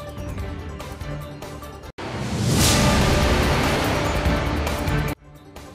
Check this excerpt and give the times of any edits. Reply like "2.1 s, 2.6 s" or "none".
1.5 s